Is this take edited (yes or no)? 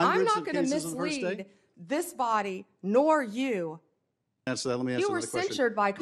yes